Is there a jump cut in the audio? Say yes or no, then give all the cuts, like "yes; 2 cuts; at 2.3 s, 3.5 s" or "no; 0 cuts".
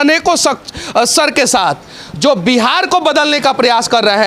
no; 0 cuts